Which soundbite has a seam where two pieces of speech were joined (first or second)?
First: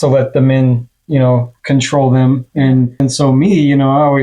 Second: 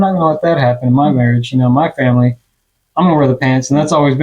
first